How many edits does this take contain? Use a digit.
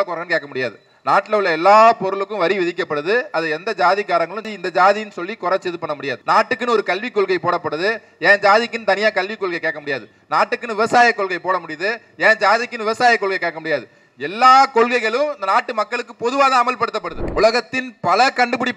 2